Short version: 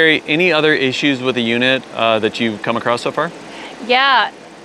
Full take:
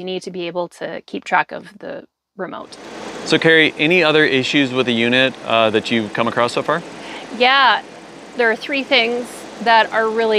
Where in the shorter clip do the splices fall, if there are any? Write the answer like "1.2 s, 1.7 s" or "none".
none

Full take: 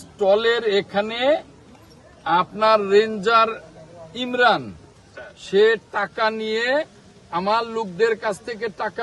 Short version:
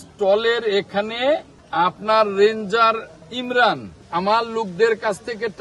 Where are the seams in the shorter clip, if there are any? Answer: 1.6 s, 3.7 s

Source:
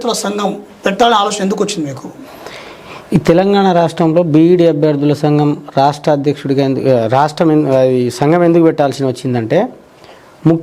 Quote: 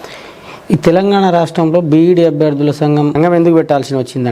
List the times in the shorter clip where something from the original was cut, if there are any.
3.1 s

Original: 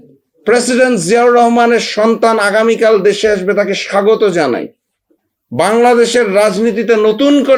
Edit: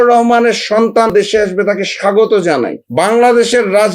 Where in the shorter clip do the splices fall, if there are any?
1.1 s, 2.8 s

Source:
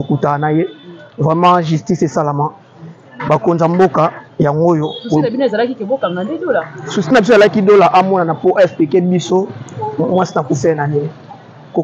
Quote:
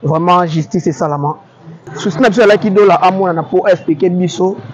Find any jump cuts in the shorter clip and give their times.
1.9 s

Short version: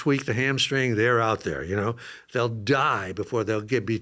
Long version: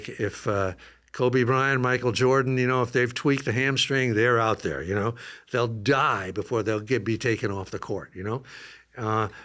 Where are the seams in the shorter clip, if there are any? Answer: none

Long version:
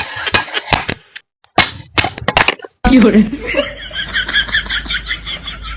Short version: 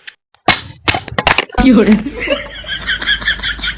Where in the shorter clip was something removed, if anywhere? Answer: 1.5 s

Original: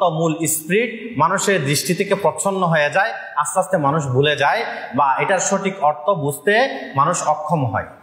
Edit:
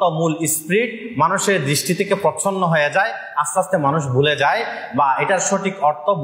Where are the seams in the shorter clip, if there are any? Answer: none

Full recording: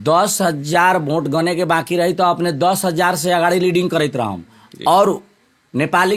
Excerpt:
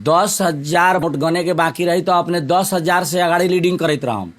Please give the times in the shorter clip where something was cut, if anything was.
1.0 s

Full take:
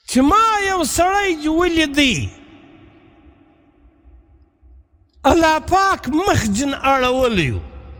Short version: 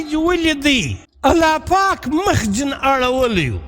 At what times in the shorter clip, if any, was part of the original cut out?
1.0 s

